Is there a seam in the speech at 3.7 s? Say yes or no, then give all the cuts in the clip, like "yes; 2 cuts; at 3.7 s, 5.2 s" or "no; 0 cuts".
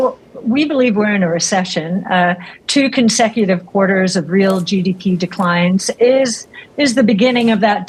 no; 0 cuts